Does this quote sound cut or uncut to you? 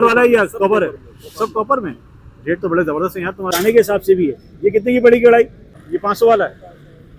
cut